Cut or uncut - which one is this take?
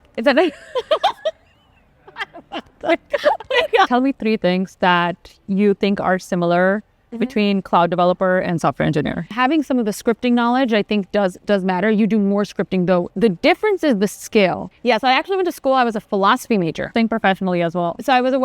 cut